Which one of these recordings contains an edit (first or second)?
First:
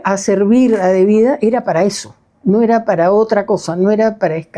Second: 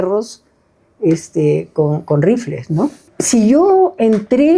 second